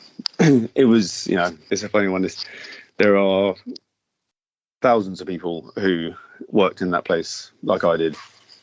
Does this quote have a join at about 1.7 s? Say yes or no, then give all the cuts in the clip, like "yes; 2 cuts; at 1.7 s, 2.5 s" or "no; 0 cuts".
yes; 1 cut; at 1.7 s